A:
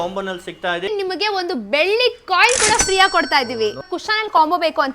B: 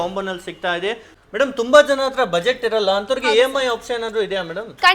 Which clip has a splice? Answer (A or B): A